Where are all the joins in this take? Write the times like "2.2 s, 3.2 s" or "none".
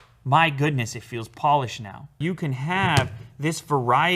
2.2 s